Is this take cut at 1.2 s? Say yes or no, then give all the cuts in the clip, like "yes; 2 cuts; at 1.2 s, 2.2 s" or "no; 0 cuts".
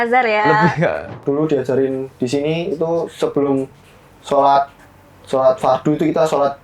yes; 1 cut; at 1.2 s